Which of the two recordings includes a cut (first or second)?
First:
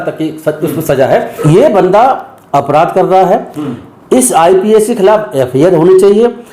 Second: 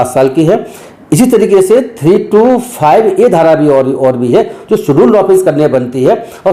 first